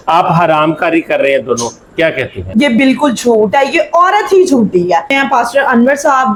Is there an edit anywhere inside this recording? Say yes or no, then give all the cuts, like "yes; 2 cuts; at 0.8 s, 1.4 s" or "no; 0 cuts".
no; 0 cuts